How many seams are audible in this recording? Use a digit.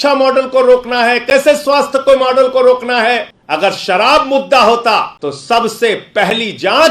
2